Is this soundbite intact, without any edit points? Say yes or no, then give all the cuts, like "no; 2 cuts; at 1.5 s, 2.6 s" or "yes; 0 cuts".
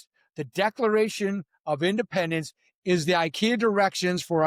yes; 0 cuts